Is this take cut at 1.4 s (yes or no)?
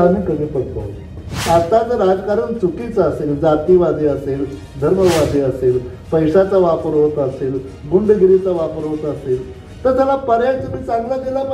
yes